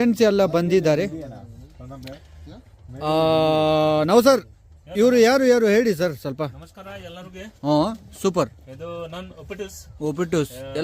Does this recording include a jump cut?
no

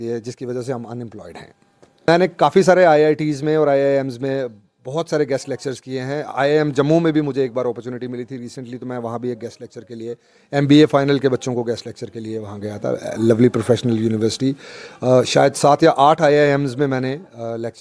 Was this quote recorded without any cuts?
no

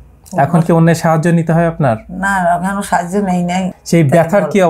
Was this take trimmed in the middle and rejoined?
no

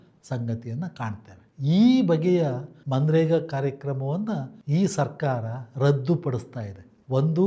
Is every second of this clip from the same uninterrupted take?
yes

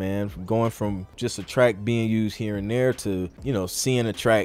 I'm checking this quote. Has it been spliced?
yes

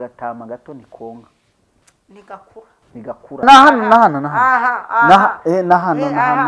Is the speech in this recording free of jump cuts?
no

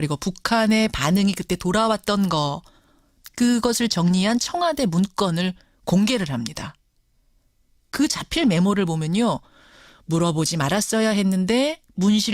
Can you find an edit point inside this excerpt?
no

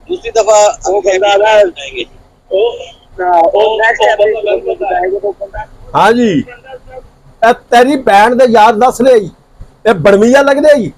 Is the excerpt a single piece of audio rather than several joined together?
yes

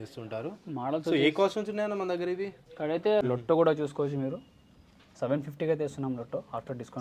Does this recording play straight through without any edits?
no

